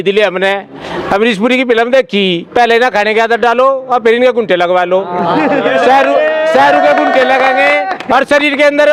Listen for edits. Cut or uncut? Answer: uncut